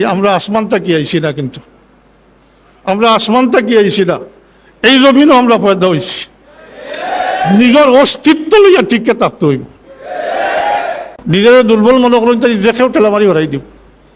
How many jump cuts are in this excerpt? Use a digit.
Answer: 1